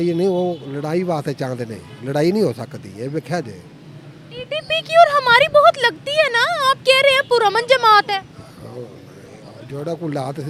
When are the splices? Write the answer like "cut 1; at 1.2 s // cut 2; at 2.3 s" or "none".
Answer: none